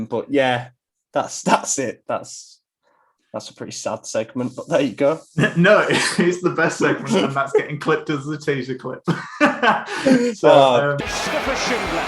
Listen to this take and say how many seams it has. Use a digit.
1